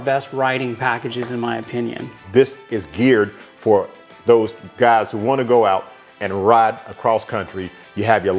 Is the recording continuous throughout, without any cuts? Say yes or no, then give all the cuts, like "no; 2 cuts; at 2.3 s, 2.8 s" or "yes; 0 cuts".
no; 1 cut; at 2.1 s